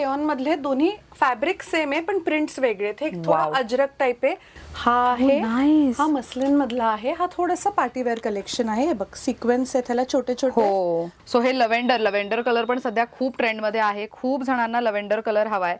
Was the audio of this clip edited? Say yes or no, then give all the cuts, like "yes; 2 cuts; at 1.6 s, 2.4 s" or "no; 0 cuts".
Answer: yes; 2 cuts; at 4.5 s, 11.1 s